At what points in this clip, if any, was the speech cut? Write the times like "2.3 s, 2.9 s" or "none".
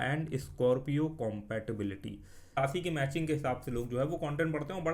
2.5 s